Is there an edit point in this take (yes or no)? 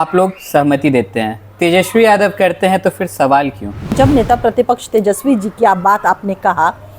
yes